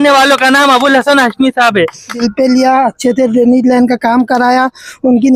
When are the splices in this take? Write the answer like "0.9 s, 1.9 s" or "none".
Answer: 2.2 s